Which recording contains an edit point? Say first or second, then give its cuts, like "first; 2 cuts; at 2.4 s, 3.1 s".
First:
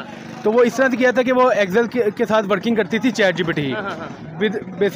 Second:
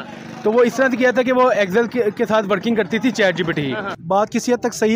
second; 1 cut; at 3.9 s